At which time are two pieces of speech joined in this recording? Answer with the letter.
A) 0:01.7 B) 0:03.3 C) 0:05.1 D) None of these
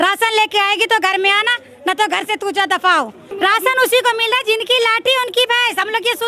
B